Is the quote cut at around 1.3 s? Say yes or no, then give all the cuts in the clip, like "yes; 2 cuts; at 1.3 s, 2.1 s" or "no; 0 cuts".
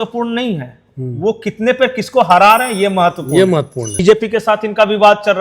no; 1 cut; at 4.0 s